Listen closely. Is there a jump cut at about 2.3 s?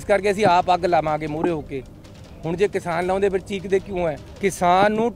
no; 1 cut; at 4.2 s

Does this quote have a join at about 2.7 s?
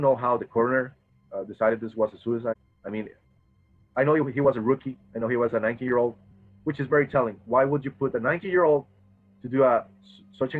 yes; 1 cut; at 2.7 s

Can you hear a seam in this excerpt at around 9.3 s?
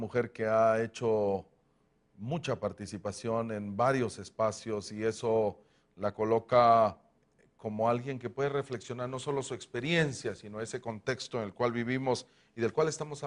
no; 0 cuts

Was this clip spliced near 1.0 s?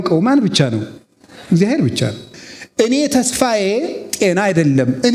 no; 1 cut; at 2.2 s

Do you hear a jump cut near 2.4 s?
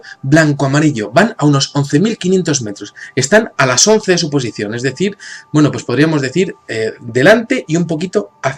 no; 1 cut; at 7.7 s

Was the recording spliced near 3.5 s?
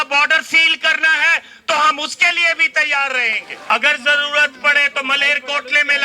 yes; 1 cut; at 3.5 s

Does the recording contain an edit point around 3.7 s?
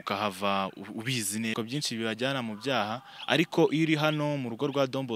no; 1 cut; at 1.5 s

